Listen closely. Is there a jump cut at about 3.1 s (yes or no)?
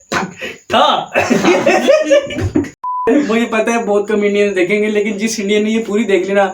yes